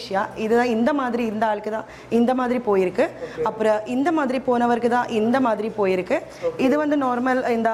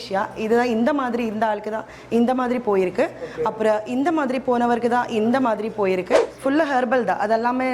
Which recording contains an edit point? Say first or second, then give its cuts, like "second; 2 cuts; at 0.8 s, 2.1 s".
second; 1 cut; at 6.3 s